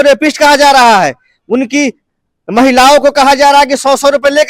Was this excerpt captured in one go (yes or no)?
yes